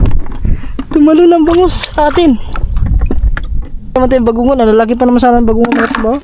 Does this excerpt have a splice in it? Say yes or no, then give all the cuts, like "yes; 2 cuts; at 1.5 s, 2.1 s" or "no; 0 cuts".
yes; 1 cut; at 4.0 s